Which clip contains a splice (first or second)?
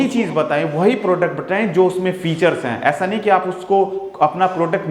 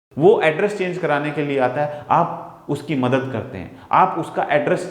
second